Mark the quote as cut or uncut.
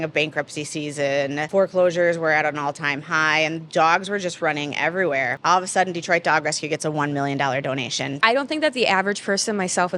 cut